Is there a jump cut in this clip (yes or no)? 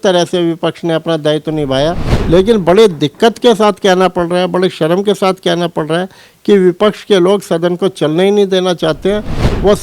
yes